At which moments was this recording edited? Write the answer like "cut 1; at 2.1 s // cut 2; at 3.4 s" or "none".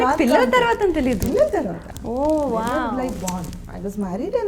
none